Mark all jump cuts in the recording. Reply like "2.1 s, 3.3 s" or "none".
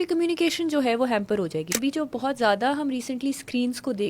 1.7 s